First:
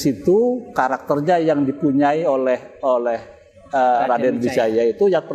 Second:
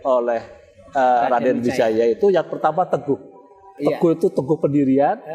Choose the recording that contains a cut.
second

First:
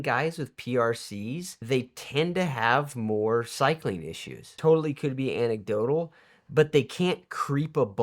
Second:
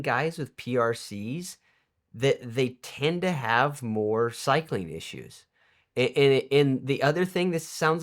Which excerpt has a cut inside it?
first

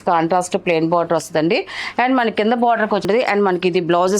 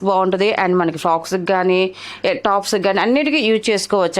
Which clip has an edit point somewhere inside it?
first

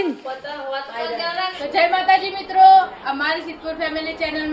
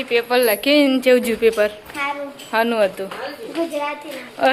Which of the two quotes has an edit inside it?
first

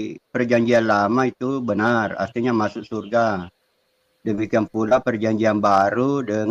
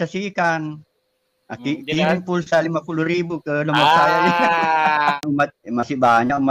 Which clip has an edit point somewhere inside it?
second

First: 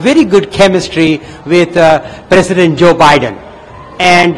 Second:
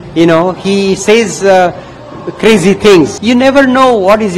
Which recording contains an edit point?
second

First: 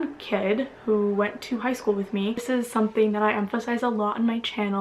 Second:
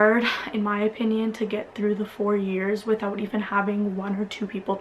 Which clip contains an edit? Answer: first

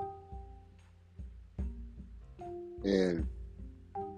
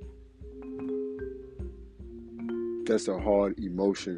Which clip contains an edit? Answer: second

